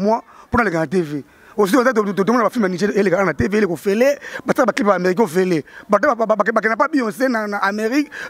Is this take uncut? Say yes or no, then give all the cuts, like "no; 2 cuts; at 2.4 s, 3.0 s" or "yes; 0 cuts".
yes; 0 cuts